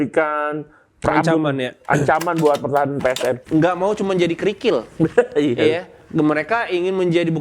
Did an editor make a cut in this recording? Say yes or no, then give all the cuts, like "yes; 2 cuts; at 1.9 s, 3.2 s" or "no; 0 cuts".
yes; 1 cut; at 3.4 s